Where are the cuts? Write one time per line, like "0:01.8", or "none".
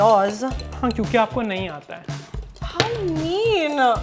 none